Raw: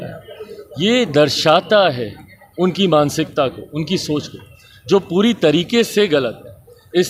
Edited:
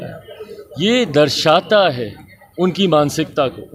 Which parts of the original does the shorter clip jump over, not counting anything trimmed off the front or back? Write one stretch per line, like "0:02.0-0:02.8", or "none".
none